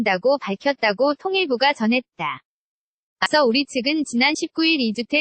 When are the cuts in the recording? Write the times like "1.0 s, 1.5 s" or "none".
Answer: 3.3 s